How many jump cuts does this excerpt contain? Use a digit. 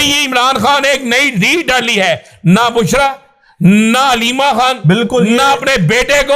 0